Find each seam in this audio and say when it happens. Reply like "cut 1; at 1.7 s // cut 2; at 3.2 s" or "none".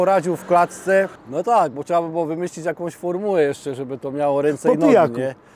cut 1; at 1.2 s